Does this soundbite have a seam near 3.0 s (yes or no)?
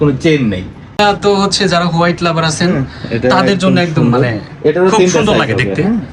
no